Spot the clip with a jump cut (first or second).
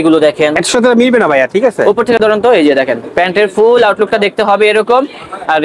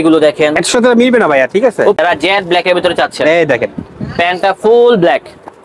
second